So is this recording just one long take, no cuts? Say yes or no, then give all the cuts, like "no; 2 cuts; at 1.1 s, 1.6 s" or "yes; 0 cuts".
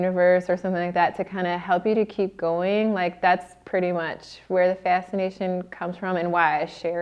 yes; 0 cuts